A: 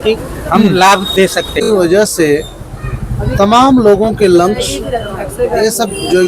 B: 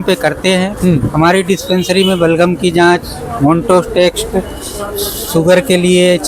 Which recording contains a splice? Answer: A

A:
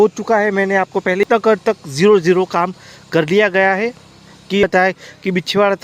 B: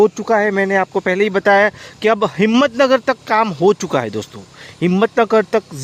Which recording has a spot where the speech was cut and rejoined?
A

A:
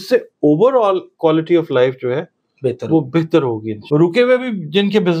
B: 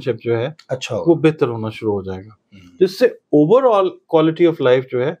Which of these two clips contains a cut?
A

